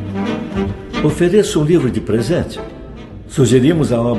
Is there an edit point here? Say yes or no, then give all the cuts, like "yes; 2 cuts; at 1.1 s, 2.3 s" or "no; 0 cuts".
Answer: no; 0 cuts